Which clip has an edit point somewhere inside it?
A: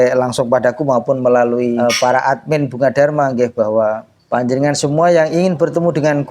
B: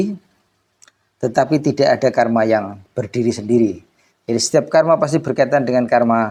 A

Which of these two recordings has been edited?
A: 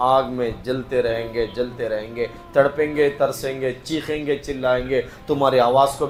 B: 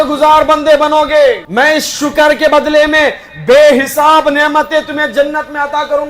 B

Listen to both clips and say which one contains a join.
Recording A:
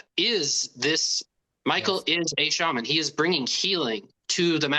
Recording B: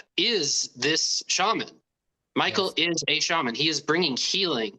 A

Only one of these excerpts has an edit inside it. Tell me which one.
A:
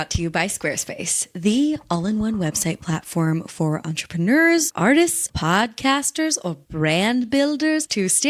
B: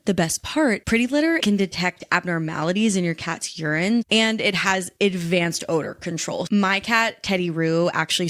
B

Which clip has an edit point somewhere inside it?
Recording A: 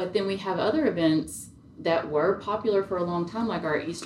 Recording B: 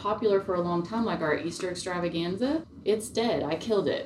B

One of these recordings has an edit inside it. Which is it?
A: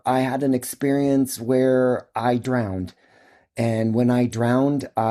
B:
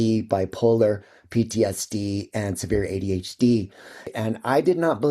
B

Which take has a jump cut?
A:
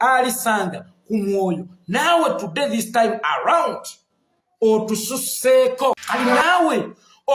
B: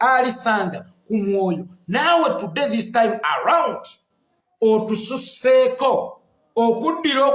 A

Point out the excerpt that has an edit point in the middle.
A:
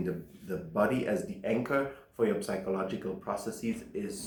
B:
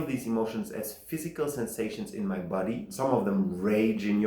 B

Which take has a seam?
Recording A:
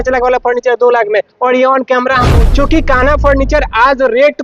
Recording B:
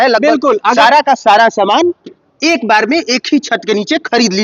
A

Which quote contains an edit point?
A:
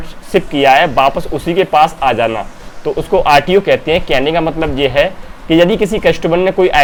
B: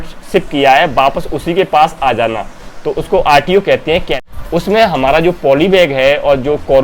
B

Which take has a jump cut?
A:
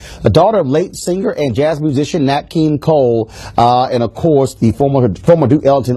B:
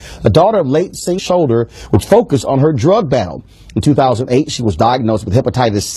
A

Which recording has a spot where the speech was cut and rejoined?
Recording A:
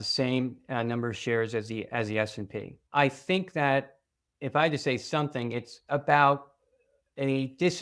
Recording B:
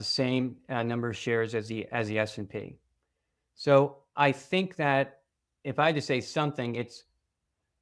A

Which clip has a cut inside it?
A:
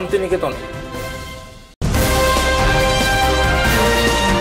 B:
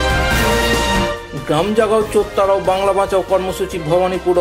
B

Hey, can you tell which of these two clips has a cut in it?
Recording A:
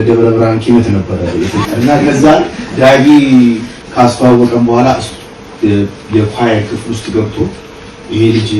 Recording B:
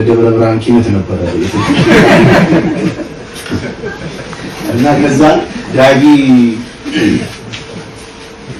A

